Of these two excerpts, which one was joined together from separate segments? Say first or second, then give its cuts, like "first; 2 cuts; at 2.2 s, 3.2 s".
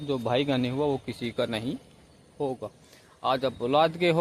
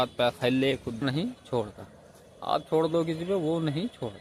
second; 1 cut; at 1.0 s